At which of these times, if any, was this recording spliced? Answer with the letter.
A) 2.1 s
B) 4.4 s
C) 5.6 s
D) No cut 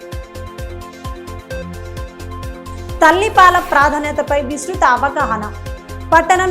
A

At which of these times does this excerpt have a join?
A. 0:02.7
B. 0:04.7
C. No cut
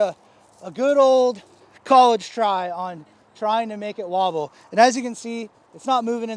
C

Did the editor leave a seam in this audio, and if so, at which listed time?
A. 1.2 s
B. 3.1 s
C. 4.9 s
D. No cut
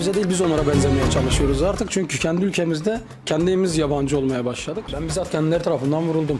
C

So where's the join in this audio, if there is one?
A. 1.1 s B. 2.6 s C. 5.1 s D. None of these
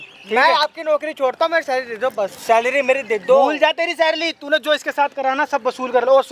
D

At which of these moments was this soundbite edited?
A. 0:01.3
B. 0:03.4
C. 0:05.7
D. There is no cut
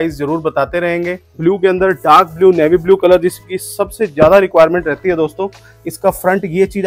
A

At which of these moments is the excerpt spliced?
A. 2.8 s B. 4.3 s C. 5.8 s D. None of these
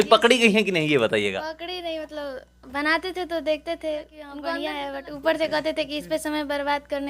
B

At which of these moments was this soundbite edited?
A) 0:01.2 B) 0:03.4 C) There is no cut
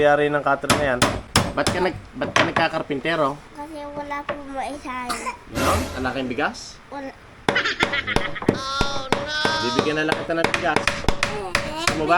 A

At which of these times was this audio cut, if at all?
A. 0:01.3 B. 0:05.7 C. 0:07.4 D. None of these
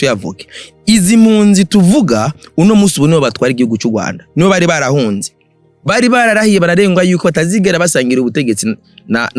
B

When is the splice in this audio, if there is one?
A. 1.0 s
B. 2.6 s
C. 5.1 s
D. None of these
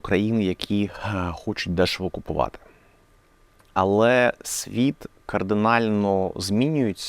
D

